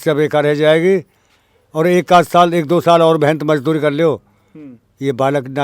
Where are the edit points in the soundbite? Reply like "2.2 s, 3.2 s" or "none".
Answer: none